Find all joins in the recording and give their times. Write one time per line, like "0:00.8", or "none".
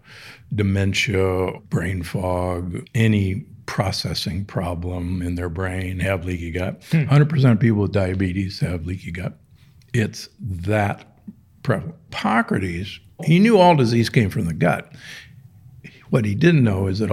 0:01.6
0:02.8
0:12.1
0:13.2

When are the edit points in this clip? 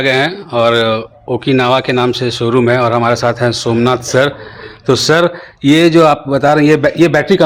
none

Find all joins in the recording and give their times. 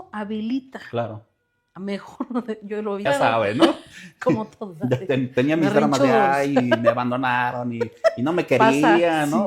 0:03.0

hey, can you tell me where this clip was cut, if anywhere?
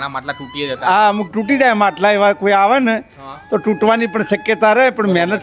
none

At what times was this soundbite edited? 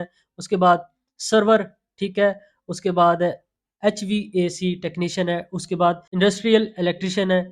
0:06.0

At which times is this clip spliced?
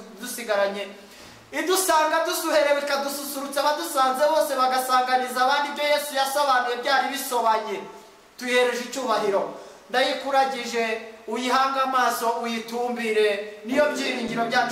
none

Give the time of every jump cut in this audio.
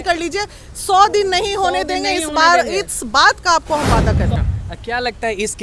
0:04.3

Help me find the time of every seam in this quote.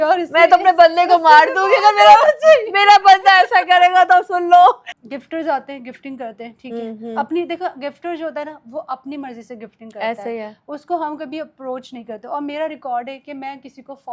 0:04.9

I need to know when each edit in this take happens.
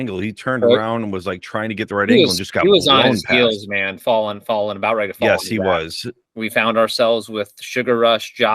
0:06.2

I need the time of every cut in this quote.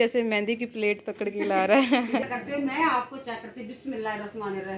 0:02.2

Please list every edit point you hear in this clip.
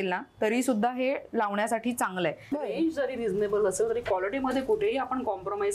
0:02.4

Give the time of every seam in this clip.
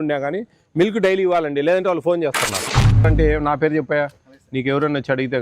0:03.0

